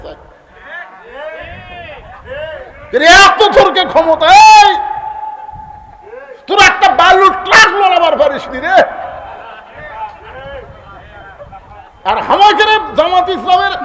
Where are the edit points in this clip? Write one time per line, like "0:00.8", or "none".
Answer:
none